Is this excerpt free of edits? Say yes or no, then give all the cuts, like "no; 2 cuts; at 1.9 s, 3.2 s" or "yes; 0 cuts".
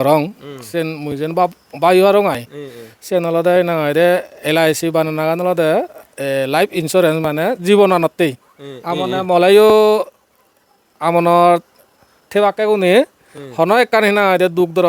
yes; 0 cuts